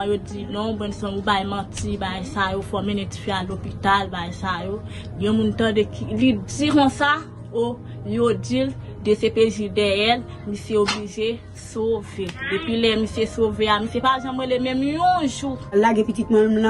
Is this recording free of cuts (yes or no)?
no